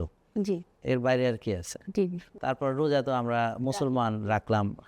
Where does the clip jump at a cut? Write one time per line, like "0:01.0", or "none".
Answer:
0:02.2